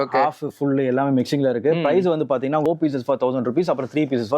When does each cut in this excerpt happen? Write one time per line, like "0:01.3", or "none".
0:02.7